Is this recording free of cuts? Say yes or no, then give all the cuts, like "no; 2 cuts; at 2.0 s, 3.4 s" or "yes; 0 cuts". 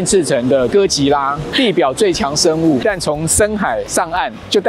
no; 1 cut; at 2.8 s